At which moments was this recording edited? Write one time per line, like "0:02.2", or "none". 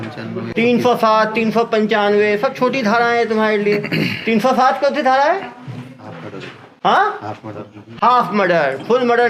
none